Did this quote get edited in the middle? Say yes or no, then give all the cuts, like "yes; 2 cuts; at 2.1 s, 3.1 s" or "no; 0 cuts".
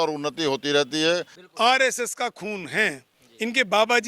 yes; 1 cut; at 1.4 s